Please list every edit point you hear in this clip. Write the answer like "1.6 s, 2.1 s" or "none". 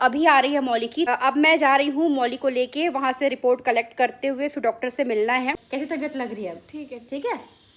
1.1 s, 5.6 s